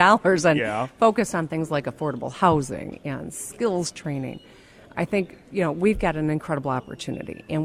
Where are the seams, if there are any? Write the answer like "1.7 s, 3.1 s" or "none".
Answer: 4.9 s